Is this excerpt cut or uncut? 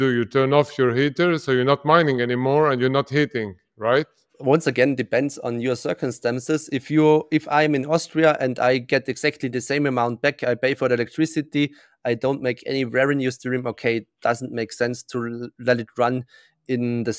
cut